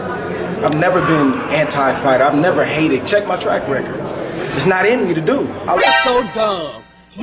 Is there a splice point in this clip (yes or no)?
yes